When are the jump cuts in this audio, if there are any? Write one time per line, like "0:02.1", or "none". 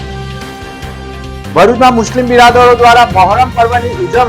none